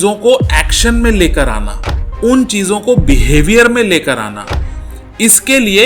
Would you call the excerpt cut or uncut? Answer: uncut